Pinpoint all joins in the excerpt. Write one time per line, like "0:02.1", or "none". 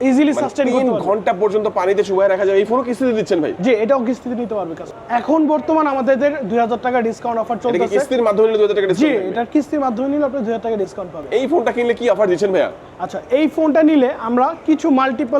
0:04.9
0:11.2